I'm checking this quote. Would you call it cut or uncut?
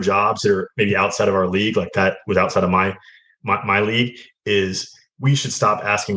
uncut